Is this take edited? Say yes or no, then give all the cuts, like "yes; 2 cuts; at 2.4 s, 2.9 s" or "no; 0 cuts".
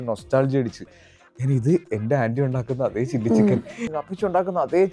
yes; 1 cut; at 3.8 s